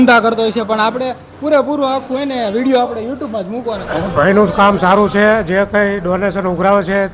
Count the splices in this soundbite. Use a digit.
1